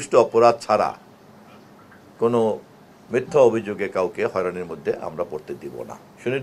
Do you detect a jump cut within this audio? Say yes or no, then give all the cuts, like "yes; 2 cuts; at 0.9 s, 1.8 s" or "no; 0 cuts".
no; 0 cuts